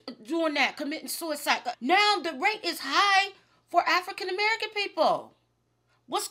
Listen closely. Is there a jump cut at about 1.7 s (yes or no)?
yes